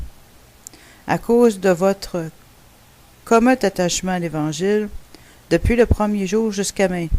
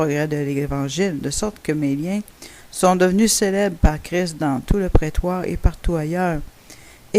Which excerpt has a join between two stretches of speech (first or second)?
first